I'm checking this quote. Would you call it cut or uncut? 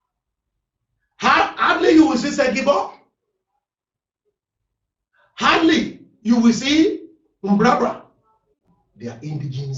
uncut